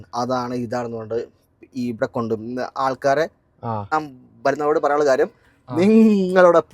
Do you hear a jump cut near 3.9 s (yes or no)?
yes